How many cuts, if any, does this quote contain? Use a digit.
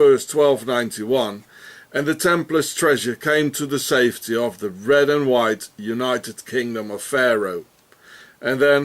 1